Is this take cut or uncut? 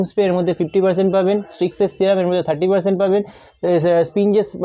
uncut